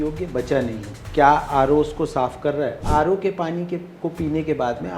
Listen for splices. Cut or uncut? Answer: cut